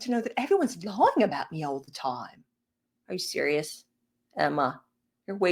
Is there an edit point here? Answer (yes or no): no